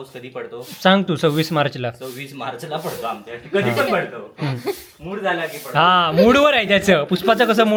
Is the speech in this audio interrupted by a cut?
no; 0 cuts

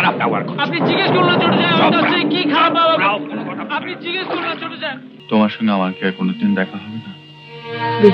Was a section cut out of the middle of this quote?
yes; 1 cut; at 5.1 s

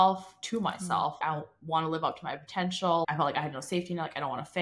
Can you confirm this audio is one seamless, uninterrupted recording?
no; 2 cuts; at 1.2 s, 3.0 s

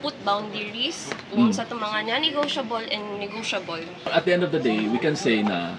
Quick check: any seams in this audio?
yes; 1 cut; at 4.1 s

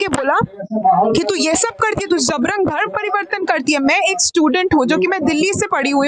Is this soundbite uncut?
yes; 0 cuts

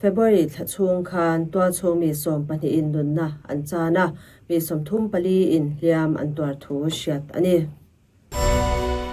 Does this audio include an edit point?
yes; 1 cut; at 8.2 s

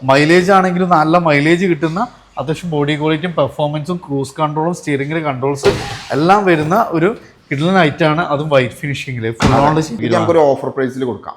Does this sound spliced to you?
yes; 1 cut; at 10.0 s

